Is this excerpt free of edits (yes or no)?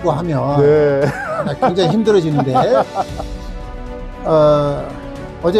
yes